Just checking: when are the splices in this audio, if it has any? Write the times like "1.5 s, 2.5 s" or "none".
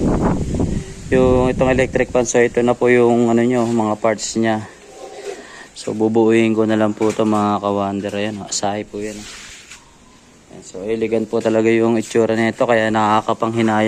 none